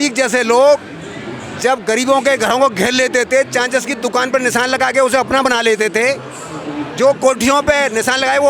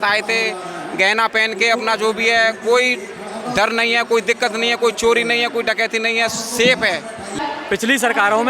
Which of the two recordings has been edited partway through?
second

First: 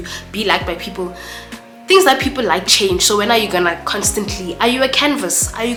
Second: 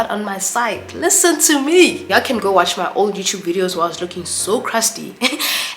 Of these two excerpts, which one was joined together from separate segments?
second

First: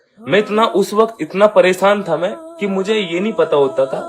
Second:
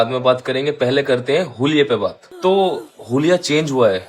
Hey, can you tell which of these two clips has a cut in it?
second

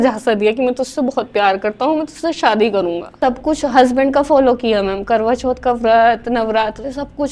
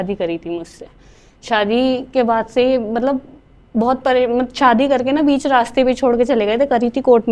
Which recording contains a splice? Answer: first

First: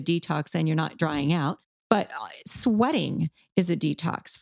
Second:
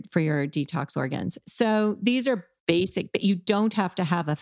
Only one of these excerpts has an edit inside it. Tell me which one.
first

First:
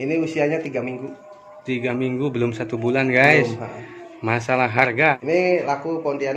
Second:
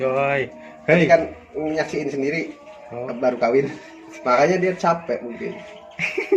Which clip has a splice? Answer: first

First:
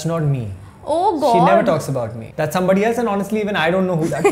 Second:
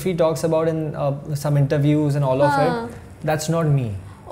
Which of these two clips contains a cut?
first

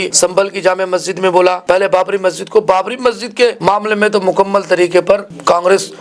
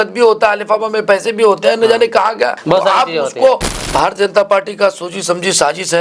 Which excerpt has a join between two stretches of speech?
second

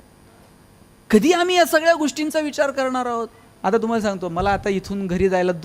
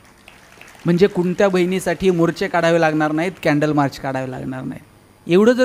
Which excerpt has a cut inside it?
first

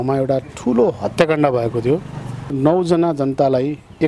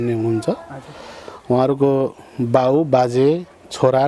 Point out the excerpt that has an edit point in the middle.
first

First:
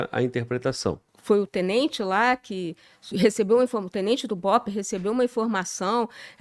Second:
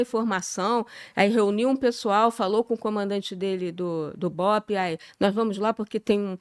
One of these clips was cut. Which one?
first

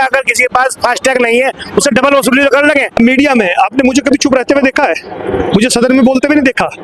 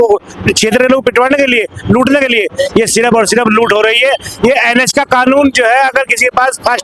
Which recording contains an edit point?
first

